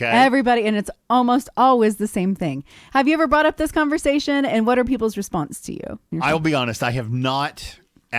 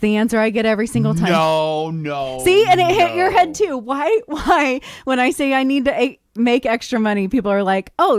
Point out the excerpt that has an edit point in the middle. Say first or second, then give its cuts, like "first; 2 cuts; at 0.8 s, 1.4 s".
first; 1 cut; at 6.0 s